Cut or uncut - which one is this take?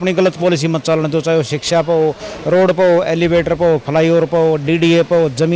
uncut